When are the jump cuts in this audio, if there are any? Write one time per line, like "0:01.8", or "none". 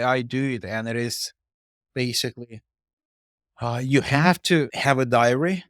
0:04.7